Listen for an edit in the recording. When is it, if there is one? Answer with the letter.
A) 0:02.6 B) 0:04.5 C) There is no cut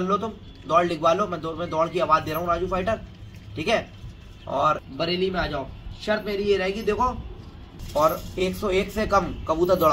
C